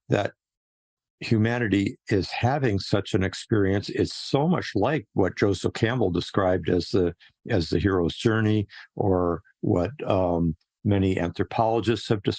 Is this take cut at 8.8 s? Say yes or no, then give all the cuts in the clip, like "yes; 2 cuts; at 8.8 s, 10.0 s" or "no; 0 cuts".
no; 0 cuts